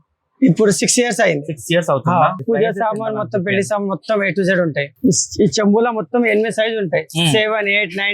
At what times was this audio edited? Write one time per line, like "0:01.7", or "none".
0:02.4
0:04.9